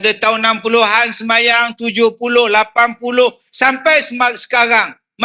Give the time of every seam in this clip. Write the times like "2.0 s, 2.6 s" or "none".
none